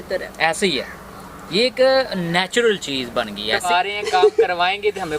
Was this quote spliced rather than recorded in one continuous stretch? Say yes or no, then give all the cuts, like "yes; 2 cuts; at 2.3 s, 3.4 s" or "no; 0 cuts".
yes; 1 cut; at 3.6 s